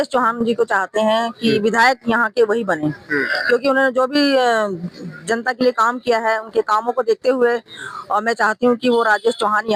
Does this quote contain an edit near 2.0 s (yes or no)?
no